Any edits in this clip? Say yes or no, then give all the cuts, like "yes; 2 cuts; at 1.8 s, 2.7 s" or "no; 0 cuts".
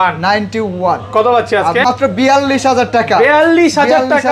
yes; 1 cut; at 1.8 s